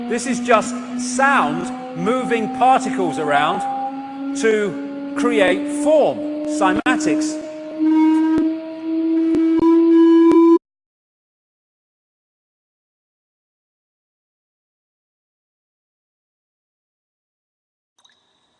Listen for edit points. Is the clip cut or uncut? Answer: uncut